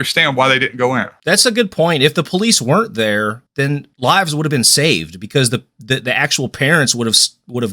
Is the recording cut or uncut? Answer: cut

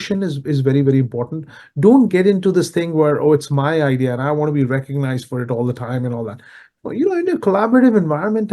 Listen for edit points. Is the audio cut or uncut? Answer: uncut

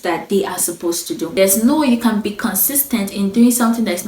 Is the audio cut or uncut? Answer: cut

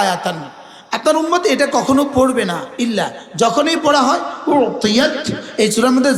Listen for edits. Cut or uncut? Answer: uncut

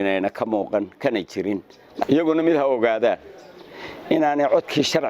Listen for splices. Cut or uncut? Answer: cut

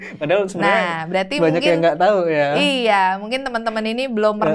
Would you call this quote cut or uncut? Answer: uncut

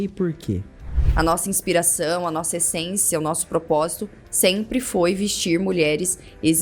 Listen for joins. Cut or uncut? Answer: cut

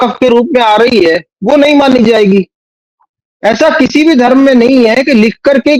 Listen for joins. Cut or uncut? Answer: uncut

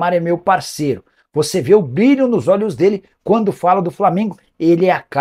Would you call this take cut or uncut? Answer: uncut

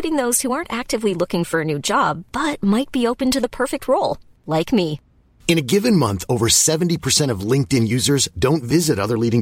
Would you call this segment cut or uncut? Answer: uncut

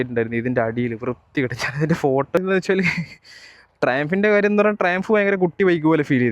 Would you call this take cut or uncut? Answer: cut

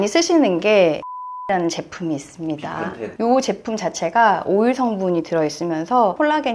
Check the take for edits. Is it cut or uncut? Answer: cut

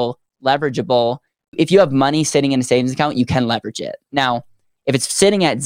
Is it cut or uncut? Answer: cut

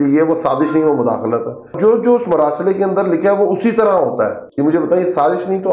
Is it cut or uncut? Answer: cut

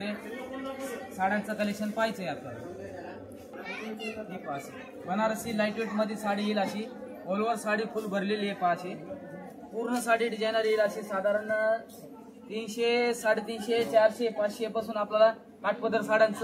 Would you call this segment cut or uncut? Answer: cut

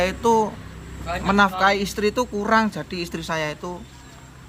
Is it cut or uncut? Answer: uncut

